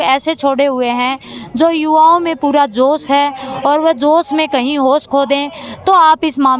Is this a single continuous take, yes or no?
yes